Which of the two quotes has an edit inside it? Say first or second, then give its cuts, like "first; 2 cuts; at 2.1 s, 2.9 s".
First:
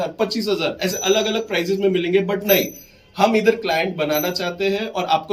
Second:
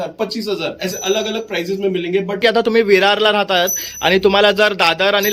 second; 1 cut; at 2.4 s